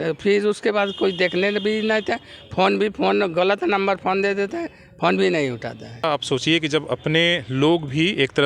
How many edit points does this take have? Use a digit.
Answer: 1